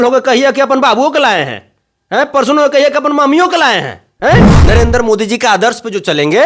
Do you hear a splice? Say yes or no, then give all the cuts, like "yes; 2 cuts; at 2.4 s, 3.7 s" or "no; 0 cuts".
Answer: yes; 1 cut; at 4.5 s